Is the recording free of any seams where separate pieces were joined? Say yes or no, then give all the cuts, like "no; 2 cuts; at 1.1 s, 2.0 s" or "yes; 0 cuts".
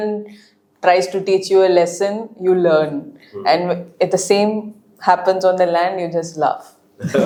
yes; 0 cuts